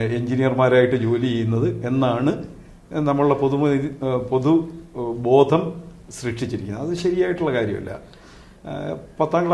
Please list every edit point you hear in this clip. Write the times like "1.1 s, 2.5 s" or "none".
none